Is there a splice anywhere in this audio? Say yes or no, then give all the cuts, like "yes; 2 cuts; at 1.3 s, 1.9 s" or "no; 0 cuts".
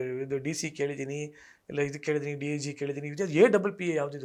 no; 0 cuts